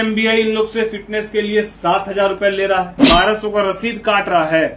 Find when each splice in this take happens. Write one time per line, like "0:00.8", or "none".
0:03.0